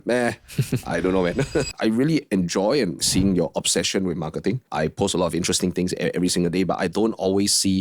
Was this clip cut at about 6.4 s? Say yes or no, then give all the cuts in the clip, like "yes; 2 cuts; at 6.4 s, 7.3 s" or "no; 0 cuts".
no; 3 cuts; at 1.7 s, 3.0 s, 4.6 s